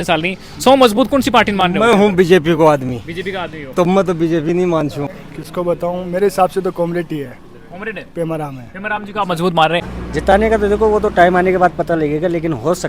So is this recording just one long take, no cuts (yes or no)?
no